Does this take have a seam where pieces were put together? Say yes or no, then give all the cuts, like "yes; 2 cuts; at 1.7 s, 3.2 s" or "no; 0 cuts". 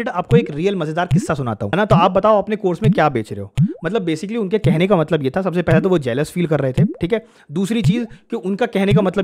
yes; 1 cut; at 1.6 s